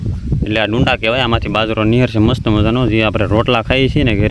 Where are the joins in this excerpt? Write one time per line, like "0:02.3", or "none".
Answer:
none